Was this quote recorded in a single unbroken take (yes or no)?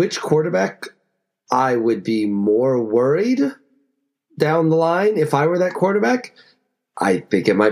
yes